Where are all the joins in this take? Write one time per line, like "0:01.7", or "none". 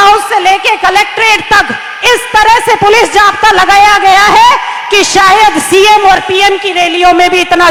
none